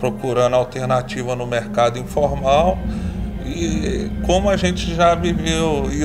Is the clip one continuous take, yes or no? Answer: yes